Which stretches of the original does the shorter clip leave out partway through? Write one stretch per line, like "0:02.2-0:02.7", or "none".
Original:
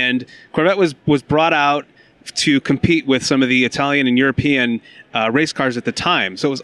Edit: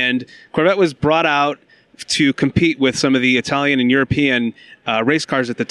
0:01.0-0:01.2